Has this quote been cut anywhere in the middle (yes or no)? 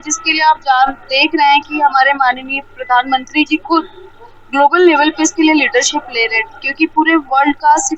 no